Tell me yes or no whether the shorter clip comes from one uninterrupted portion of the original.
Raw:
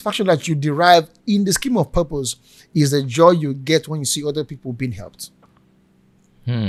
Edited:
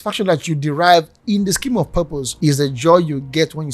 no